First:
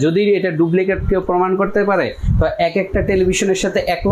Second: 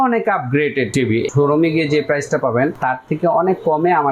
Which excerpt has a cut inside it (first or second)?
second